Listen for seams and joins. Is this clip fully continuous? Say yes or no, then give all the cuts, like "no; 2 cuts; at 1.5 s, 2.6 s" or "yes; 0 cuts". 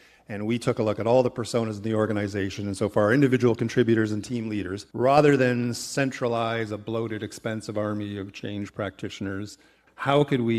no; 1 cut; at 4.8 s